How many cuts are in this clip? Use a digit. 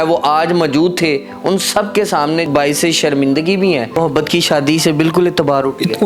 2